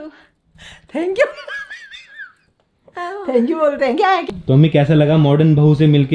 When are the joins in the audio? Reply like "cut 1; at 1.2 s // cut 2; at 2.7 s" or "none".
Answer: cut 1; at 4.2 s